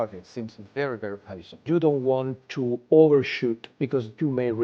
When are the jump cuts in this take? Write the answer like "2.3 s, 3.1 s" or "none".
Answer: 1.6 s, 3.7 s